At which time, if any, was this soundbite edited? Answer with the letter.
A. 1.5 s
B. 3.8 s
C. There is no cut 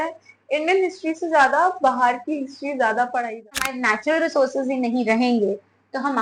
B